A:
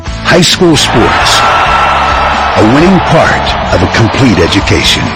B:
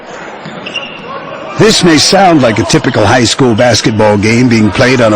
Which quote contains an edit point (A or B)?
B